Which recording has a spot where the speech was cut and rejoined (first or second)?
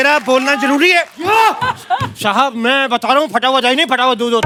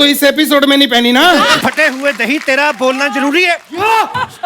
second